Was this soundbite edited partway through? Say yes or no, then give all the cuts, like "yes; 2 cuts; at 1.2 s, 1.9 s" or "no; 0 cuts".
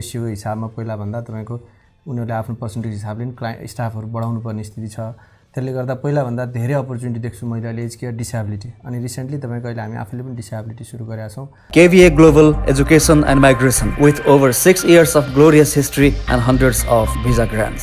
yes; 1 cut; at 11.5 s